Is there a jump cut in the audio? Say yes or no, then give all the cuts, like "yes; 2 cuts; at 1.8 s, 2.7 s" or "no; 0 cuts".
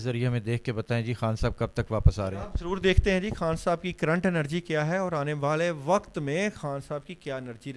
no; 0 cuts